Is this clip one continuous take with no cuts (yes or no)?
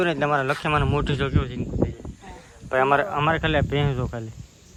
yes